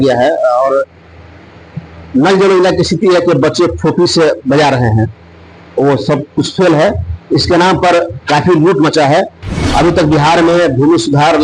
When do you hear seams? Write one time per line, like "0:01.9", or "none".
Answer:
0:09.4